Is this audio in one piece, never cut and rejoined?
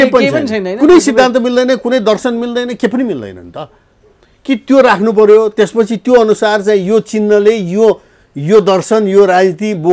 yes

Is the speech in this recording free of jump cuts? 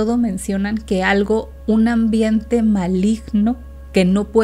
no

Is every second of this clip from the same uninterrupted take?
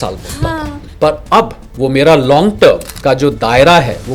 no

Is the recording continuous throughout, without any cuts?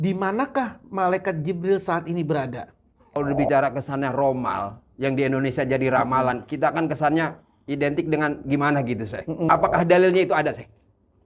no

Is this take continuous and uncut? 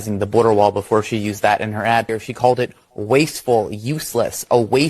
no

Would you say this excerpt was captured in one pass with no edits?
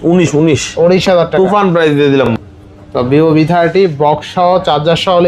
no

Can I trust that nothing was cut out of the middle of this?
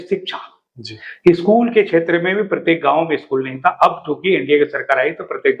yes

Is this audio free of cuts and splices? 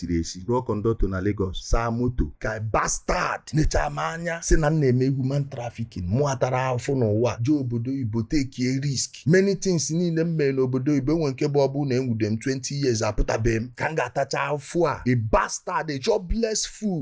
yes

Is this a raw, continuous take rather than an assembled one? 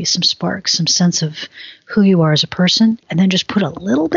no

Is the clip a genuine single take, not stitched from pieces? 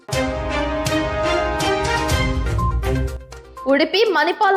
no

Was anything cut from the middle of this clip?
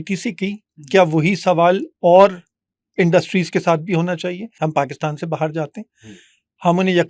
yes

